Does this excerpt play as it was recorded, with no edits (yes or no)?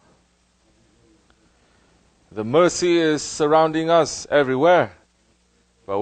no